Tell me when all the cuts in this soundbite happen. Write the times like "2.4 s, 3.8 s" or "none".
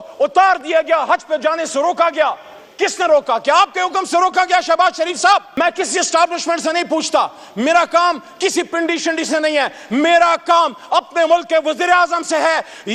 5.5 s